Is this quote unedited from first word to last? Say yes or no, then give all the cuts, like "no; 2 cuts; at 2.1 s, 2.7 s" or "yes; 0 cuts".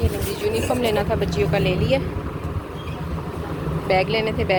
yes; 0 cuts